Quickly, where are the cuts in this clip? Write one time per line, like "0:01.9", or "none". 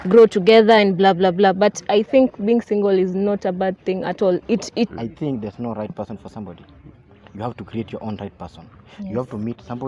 0:04.9